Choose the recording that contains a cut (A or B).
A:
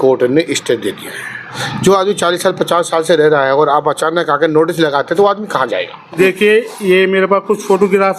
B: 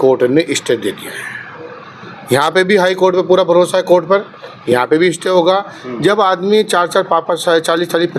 A